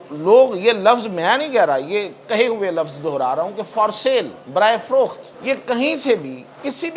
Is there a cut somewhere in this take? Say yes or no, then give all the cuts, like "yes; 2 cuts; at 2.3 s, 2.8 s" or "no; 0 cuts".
yes; 2 cuts; at 4.4 s, 5.3 s